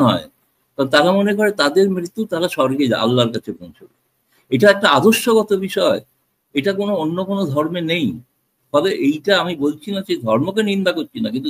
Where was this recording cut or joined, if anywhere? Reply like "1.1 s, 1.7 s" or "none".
none